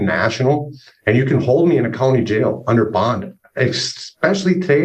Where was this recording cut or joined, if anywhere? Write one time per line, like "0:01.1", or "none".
none